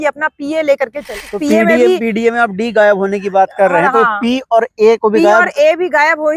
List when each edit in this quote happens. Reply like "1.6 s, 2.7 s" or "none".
none